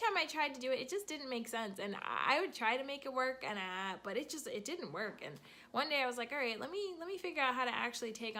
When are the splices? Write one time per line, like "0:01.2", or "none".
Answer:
none